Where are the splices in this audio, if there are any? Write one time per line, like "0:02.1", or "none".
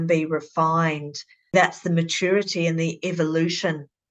0:01.5